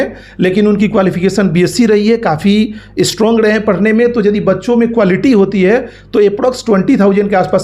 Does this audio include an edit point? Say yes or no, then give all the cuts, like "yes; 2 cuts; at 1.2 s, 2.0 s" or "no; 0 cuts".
no; 0 cuts